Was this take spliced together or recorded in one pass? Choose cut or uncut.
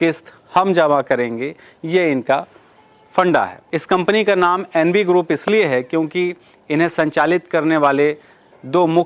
cut